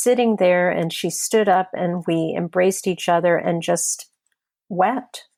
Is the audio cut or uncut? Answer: uncut